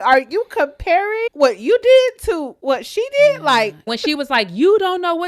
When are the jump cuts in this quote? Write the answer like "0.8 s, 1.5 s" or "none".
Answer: 2.5 s, 3.9 s